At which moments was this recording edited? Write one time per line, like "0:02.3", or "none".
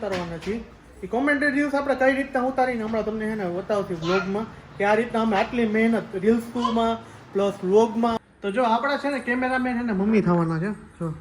0:08.2